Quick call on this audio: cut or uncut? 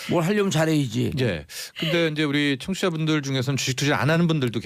uncut